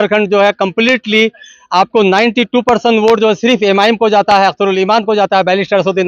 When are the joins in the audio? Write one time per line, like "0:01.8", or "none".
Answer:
none